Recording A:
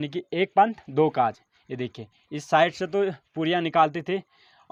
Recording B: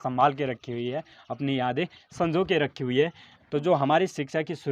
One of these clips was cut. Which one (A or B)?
B